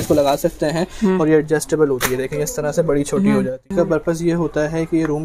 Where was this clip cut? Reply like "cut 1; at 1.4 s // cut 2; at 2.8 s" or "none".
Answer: cut 1; at 3.6 s